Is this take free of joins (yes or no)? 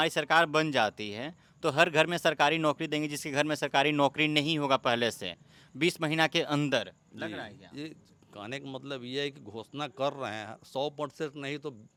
yes